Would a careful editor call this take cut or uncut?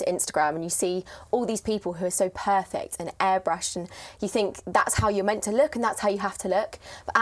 uncut